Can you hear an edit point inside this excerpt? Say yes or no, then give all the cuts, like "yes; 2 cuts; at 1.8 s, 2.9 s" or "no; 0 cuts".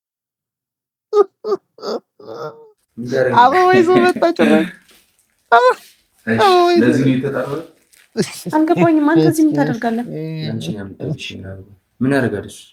no; 0 cuts